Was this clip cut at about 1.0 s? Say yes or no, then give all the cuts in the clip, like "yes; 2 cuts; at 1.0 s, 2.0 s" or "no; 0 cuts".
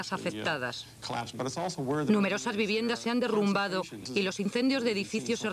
yes; 1 cut; at 1.0 s